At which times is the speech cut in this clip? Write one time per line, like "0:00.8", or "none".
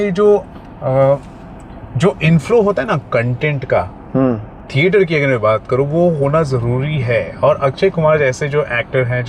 none

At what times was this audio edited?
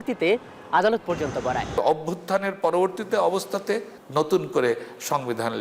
0:01.7
0:04.0

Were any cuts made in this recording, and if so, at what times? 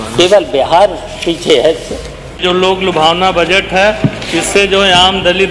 0:02.4

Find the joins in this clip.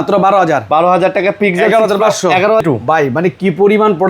0:02.6

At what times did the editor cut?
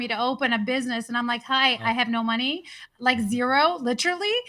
none

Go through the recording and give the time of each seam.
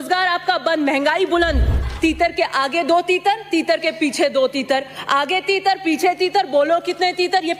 0:01.8

